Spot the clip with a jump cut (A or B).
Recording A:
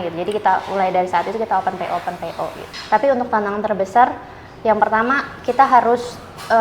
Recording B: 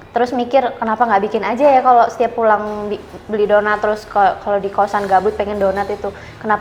A